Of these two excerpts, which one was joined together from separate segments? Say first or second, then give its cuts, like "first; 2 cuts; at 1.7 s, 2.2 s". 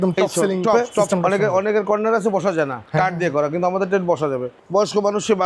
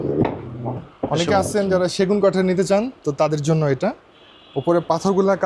first; 2 cuts; at 0.9 s, 4.5 s